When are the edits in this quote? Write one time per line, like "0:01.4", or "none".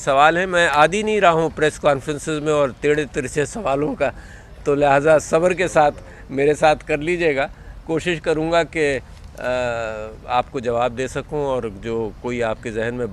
0:06.8